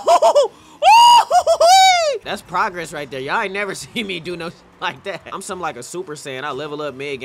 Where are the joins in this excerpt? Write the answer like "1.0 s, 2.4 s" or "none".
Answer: 2.2 s, 5.2 s